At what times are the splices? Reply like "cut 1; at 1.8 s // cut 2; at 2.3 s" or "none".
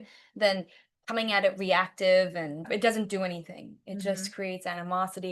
cut 1; at 2.6 s